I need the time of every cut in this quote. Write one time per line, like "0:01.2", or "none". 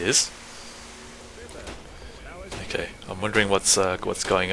0:01.3